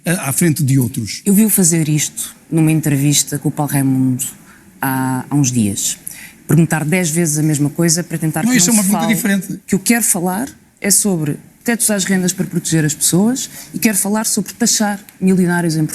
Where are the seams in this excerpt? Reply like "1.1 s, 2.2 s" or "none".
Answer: 9.5 s